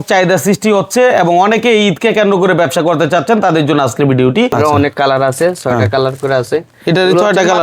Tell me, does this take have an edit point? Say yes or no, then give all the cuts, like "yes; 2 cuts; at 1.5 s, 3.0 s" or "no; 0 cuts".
yes; 1 cut; at 4.5 s